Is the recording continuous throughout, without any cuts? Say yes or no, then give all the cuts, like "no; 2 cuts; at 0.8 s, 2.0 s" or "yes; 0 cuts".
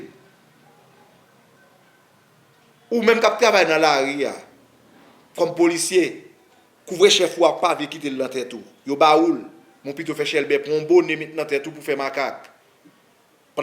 yes; 0 cuts